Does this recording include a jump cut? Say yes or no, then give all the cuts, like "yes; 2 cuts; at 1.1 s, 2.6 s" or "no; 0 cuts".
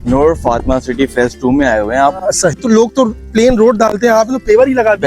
yes; 1 cut; at 2.6 s